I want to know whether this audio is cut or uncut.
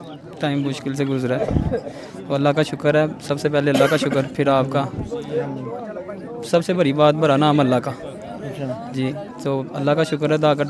uncut